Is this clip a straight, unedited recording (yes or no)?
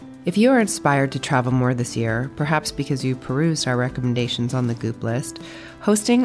yes